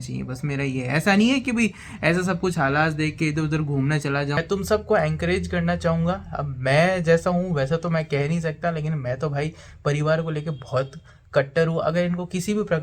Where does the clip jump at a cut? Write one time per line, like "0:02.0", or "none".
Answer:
0:04.4

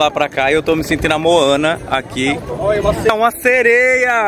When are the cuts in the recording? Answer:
none

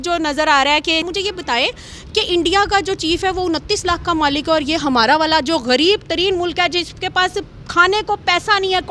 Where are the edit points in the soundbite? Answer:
0:01.1

